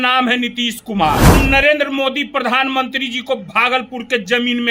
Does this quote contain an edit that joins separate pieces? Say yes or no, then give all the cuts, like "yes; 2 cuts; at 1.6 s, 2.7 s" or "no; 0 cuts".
yes; 1 cut; at 1.3 s